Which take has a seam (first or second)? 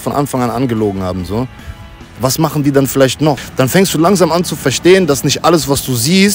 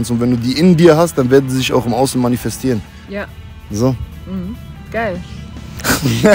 first